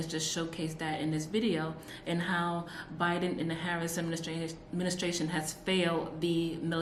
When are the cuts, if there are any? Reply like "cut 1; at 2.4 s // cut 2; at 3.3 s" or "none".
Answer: none